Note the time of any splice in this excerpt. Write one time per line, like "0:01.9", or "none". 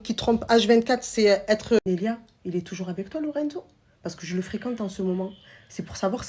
0:01.8